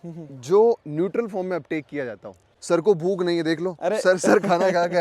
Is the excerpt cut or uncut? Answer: cut